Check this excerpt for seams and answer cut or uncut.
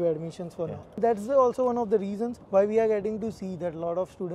cut